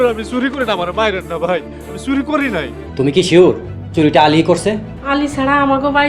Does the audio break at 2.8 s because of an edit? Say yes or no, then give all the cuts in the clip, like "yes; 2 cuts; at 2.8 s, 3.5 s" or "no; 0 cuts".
yes; 2 cuts; at 2.8 s, 4.9 s